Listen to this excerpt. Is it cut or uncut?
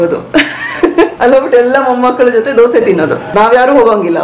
cut